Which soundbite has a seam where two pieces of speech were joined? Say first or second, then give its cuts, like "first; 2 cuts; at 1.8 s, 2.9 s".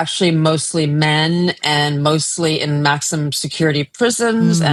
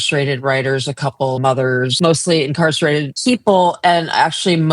second; 2 cuts; at 1.6 s, 3.1 s